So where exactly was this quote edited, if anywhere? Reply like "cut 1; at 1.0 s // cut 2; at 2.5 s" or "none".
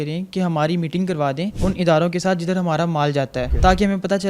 cut 1; at 1.5 s // cut 2; at 3.5 s